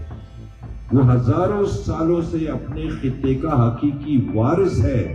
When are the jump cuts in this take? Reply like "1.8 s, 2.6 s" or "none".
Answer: none

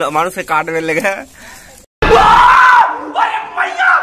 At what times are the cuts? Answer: none

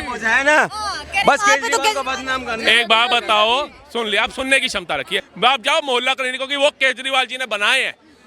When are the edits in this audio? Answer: 5.3 s

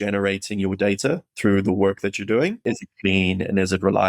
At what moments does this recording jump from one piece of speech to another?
1.3 s, 2.6 s

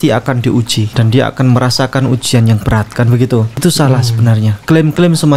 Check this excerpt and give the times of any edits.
0.9 s, 3.6 s, 4.6 s

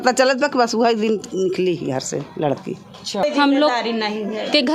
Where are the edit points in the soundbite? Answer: 3.2 s

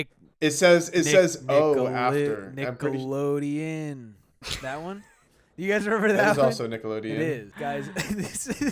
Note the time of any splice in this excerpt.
7.5 s

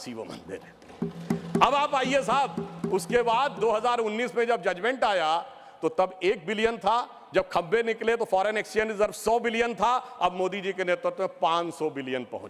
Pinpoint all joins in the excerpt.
none

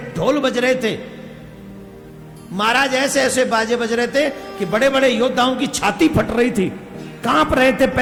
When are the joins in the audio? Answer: none

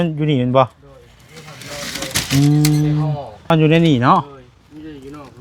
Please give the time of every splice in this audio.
3.5 s

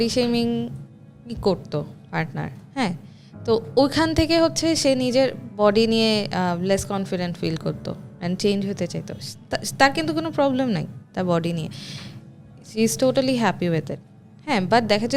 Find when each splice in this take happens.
none

